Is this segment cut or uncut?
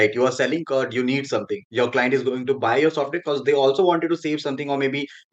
uncut